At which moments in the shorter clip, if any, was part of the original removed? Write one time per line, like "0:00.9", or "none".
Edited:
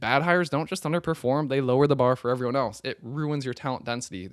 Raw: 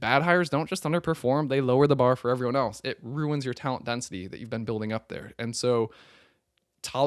none